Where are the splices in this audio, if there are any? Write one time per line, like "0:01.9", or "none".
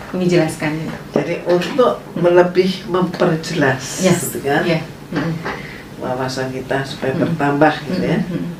none